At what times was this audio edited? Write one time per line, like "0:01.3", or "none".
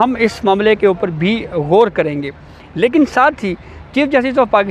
none